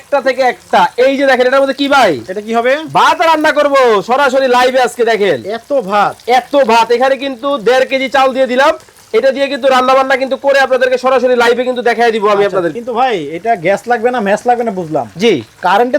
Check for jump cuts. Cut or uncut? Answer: cut